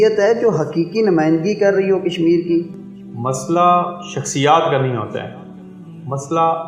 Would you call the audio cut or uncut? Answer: cut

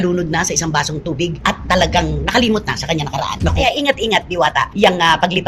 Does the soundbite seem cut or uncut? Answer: cut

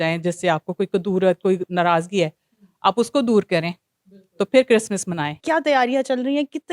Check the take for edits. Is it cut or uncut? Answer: cut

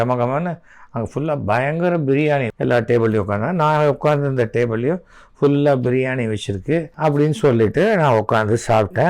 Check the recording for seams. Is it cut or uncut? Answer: cut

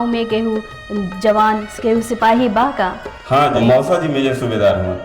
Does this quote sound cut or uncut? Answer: cut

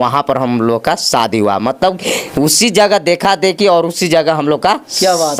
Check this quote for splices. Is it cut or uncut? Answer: uncut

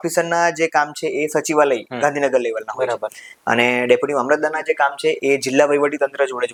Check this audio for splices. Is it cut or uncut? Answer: uncut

